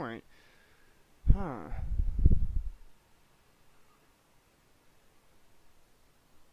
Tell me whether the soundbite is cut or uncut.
uncut